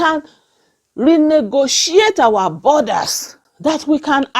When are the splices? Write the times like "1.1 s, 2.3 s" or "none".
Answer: 3.3 s